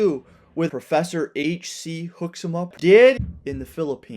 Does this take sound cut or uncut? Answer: cut